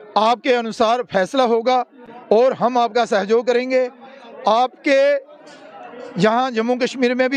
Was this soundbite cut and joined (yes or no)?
yes